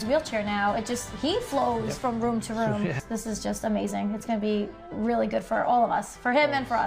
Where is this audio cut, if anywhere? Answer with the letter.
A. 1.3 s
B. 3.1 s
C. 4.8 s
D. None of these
B